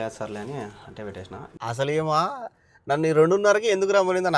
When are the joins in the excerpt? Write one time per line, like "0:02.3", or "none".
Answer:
0:01.5